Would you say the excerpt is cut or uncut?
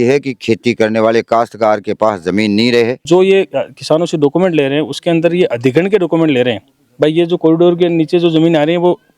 cut